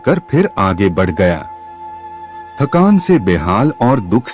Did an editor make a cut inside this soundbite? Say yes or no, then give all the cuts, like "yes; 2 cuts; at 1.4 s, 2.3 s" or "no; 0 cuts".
no; 0 cuts